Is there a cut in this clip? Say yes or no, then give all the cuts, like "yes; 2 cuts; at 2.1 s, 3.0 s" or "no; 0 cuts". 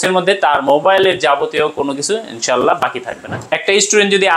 yes; 1 cut; at 3.3 s